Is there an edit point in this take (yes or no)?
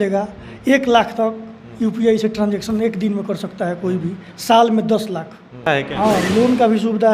yes